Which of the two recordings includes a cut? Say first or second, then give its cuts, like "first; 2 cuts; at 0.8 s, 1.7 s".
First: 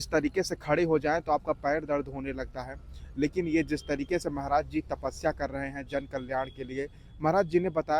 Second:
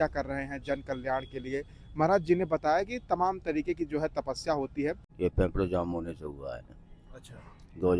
second; 1 cut; at 5.1 s